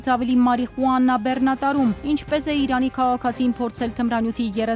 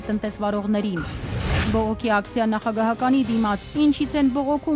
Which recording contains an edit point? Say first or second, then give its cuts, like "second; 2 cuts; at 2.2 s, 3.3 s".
second; 1 cut; at 1.6 s